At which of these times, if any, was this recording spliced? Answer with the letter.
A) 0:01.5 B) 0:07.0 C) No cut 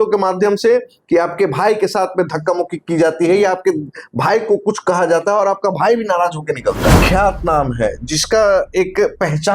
B